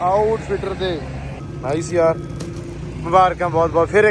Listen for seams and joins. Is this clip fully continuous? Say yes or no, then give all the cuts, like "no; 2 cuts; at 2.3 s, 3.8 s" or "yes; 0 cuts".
no; 1 cut; at 1.3 s